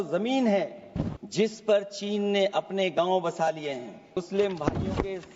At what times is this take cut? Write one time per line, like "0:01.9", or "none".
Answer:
0:01.2
0:04.2

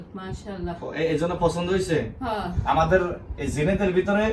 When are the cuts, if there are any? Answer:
0:02.5

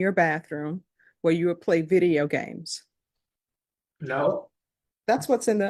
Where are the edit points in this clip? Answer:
none

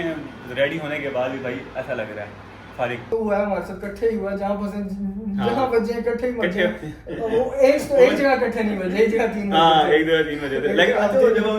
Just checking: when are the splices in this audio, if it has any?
0:03.1

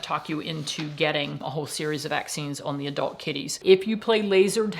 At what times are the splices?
0:03.6

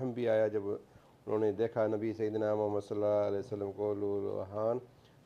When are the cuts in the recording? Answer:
none

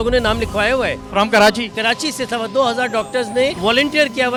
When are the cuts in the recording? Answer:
none

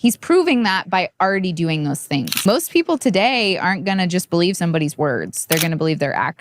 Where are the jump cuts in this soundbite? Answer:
0:02.3

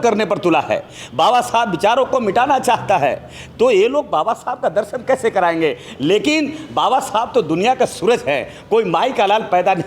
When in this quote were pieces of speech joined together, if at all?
none

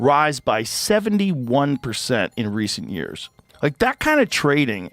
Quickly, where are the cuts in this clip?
0:03.3

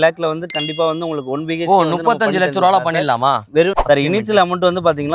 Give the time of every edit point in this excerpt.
0:03.8

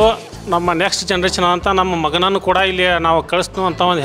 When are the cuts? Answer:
none

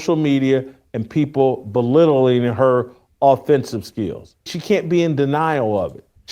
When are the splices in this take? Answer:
0:04.5

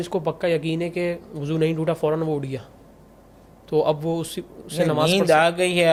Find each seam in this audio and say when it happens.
none

